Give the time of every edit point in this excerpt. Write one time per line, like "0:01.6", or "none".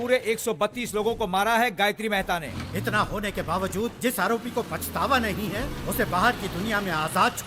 0:02.4